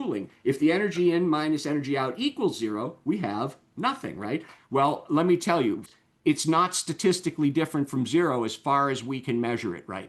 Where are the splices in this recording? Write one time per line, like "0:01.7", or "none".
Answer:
0:05.9